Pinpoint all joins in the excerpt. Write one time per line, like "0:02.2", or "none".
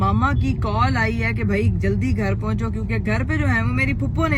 none